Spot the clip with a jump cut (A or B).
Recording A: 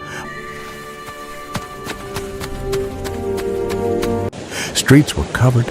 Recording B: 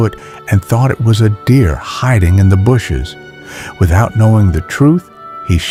A